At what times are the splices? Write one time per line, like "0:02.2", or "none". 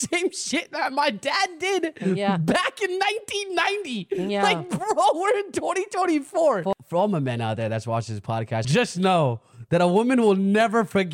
0:06.7
0:08.6